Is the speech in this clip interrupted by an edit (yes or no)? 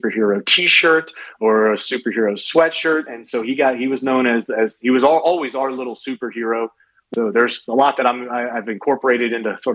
yes